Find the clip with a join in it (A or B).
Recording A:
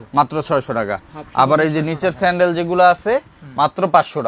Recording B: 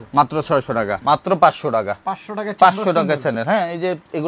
B